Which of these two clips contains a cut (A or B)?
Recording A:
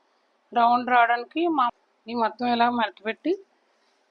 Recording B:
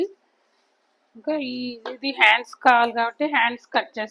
A